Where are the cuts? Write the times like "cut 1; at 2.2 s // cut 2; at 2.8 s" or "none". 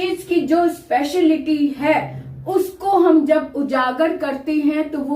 none